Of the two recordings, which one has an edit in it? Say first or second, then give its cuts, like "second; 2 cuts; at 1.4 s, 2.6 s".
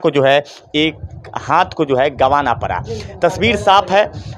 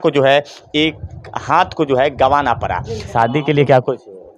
second; 1 cut; at 3.1 s